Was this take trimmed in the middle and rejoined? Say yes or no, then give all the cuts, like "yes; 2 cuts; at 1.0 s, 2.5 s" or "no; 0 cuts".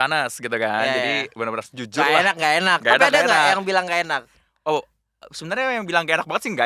no; 0 cuts